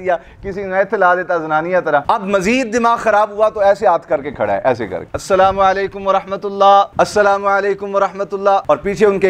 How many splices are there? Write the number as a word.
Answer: two